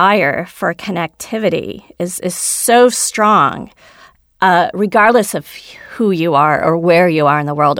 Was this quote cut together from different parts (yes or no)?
no